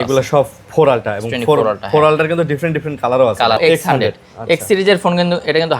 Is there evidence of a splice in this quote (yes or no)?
yes